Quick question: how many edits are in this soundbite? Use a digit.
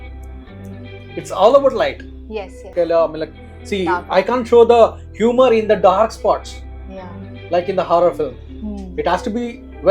1